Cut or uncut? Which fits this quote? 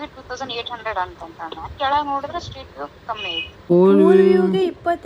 cut